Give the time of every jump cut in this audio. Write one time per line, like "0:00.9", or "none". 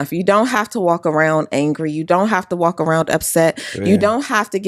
none